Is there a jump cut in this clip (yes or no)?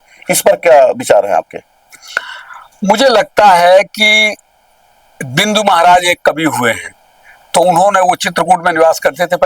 no